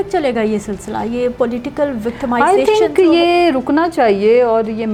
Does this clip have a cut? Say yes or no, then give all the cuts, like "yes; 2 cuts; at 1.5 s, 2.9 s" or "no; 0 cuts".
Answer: no; 0 cuts